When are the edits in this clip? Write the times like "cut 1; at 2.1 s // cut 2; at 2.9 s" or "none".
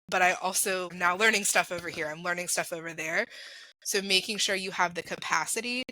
cut 1; at 0.9 s